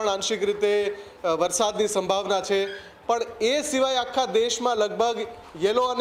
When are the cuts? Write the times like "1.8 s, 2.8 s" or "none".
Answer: none